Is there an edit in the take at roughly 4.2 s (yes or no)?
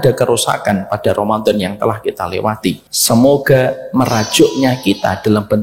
no